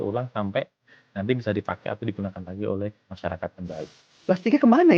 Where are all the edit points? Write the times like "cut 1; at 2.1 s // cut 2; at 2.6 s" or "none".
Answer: cut 1; at 4.0 s